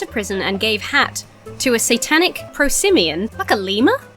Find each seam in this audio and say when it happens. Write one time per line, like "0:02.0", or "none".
0:02.4
0:03.4